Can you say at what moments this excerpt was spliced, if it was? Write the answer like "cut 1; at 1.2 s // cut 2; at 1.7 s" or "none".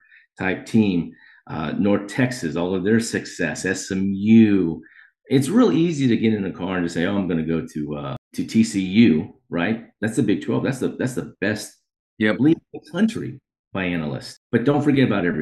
cut 1; at 8.2 s // cut 2; at 14.3 s